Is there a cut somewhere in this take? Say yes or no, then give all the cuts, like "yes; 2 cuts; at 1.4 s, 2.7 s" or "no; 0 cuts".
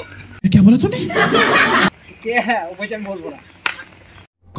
yes; 1 cut; at 1.9 s